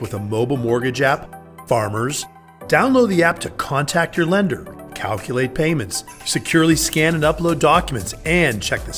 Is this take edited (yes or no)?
no